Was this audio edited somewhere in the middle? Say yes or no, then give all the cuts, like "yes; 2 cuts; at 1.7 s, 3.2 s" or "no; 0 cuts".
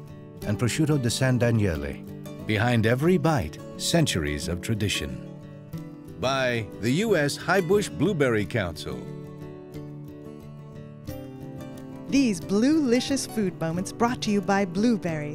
no; 0 cuts